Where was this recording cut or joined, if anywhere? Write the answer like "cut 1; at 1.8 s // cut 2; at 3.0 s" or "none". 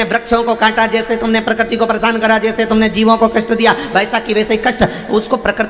none